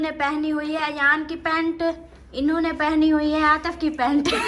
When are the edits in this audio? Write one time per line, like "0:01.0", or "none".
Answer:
none